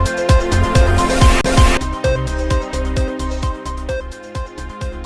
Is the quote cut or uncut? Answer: uncut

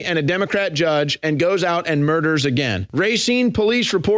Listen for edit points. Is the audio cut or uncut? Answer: cut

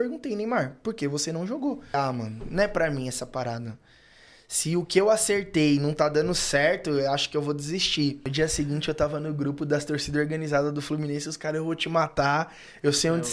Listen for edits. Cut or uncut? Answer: cut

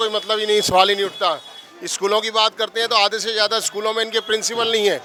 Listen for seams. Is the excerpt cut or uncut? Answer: uncut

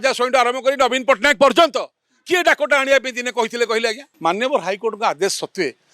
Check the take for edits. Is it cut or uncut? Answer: cut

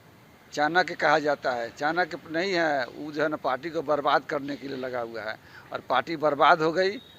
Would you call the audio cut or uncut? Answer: uncut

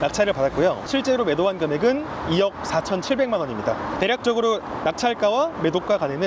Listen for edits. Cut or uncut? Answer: uncut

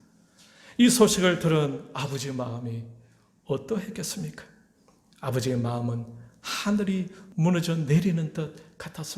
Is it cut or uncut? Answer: cut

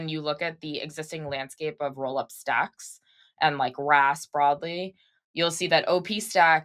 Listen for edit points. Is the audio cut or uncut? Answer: uncut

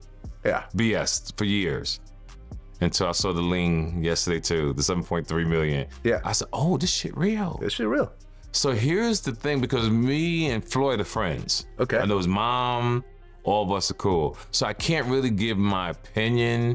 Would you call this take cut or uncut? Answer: uncut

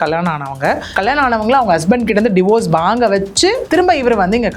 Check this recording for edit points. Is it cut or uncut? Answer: cut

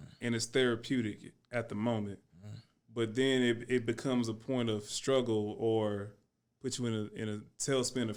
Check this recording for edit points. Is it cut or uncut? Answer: uncut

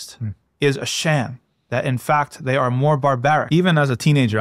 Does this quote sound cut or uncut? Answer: cut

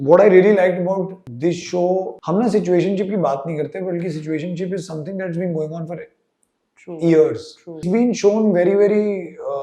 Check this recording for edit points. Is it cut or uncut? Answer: cut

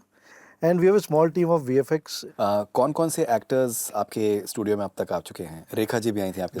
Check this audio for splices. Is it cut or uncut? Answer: cut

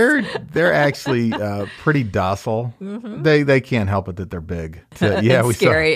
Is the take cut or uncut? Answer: cut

